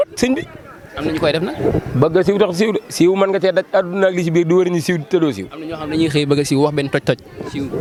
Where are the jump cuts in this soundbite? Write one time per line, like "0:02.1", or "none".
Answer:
none